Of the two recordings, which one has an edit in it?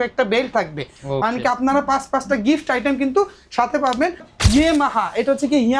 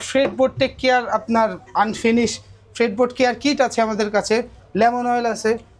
first; 1 cut; at 4.3 s

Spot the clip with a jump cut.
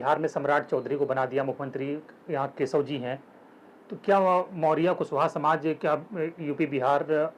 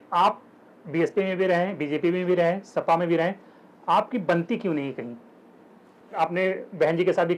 second; 1 cut; at 6.2 s

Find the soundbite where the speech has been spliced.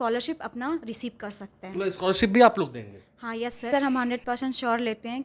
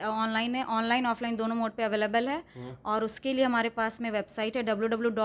first; 1 cut; at 3.7 s

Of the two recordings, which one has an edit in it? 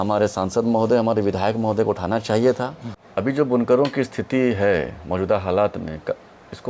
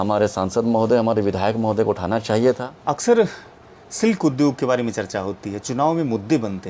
second; 1 cut; at 2.7 s

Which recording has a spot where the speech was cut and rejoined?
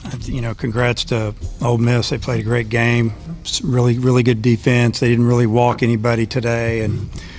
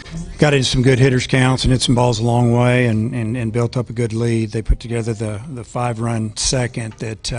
second; 1 cut; at 4.3 s

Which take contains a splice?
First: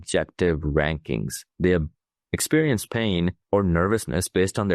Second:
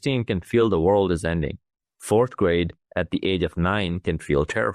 first; 2 cuts; at 1.4 s, 3.4 s

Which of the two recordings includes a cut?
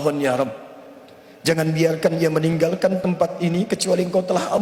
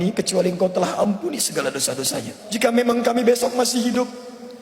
second; 1 cut; at 2.4 s

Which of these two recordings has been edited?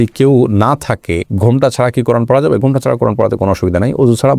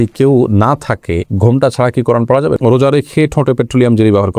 second; 1 cut; at 2.6 s

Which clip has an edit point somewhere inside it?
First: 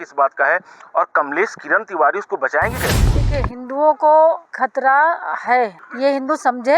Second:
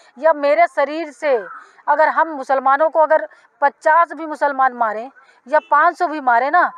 first; 3 cuts; at 3.1 s, 4.5 s, 5.8 s

